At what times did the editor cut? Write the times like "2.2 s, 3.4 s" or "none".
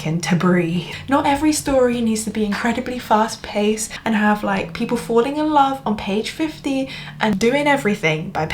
0.9 s, 3.9 s, 7.3 s